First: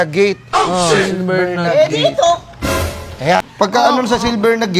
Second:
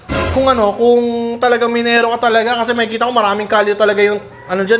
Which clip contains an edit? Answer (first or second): first